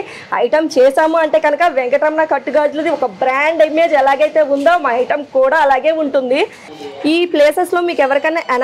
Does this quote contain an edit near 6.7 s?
yes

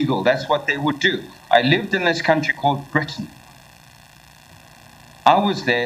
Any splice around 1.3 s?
no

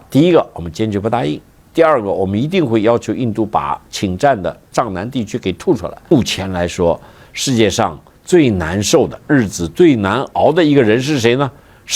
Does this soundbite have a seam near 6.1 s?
yes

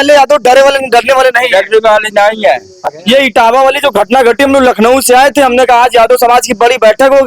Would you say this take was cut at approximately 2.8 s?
yes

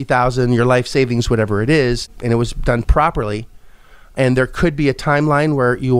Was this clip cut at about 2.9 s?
yes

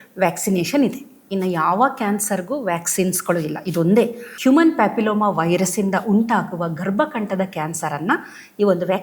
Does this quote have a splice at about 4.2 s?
yes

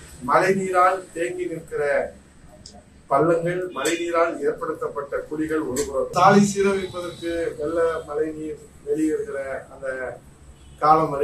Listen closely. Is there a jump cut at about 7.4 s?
no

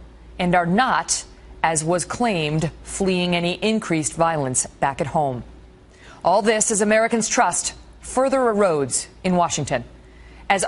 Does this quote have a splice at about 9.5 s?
no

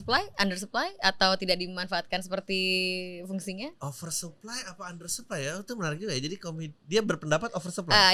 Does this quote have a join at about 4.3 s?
no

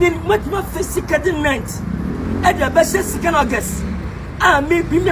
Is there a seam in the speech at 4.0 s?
no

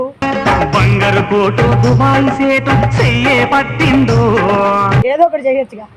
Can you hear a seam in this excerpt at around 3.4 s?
no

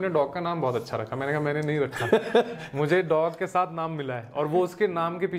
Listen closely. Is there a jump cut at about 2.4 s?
no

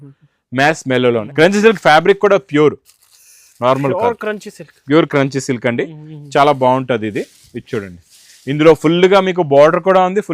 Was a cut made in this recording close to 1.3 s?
yes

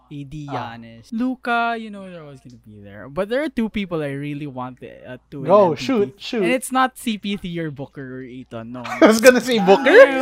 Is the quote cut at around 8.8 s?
no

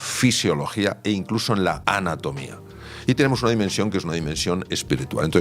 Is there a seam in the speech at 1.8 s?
yes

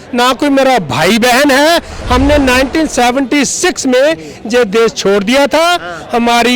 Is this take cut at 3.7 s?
no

